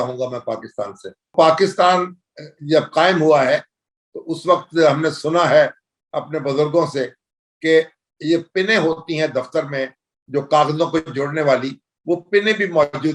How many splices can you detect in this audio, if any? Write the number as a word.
one